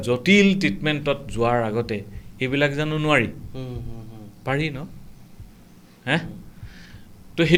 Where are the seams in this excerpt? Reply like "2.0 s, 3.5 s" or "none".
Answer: none